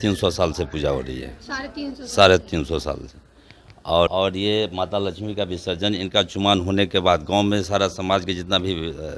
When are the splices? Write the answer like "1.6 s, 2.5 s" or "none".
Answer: 4.1 s